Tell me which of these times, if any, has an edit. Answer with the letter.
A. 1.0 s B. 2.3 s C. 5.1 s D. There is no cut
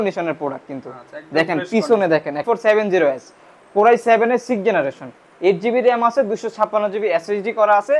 B